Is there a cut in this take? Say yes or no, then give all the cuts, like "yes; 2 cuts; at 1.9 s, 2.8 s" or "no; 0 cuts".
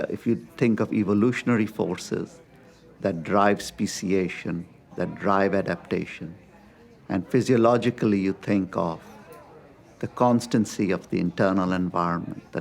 no; 0 cuts